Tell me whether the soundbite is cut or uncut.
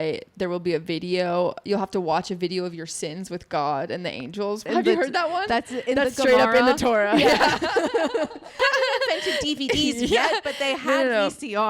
cut